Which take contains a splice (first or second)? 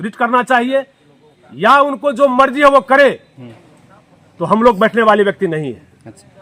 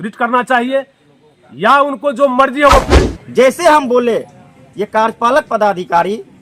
second